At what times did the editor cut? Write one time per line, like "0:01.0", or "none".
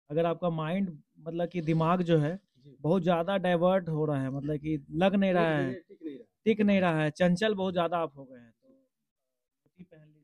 none